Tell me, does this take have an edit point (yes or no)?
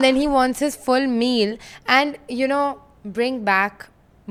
no